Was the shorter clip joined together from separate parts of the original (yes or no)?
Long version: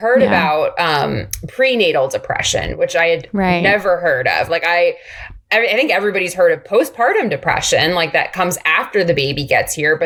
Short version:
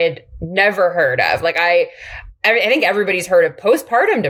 no